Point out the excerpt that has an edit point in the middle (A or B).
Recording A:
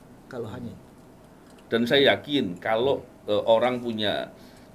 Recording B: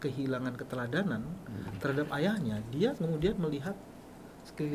A